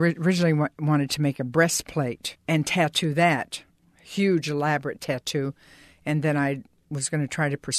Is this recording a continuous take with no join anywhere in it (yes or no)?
no